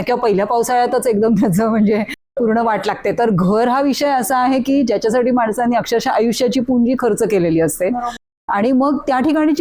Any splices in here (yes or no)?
no